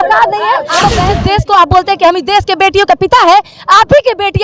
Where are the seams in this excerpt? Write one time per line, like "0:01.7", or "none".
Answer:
0:01.0